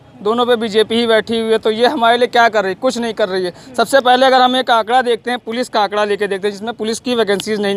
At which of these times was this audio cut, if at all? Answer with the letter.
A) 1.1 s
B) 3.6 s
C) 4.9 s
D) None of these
D